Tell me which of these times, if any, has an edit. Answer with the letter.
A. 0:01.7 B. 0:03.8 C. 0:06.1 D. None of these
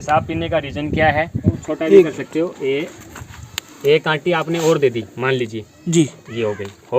A